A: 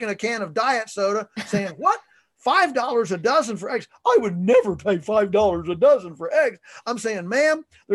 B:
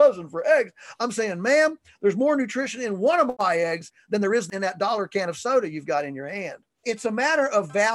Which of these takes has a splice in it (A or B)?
B